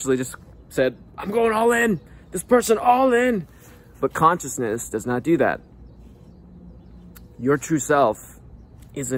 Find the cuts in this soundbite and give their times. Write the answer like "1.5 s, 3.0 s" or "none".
none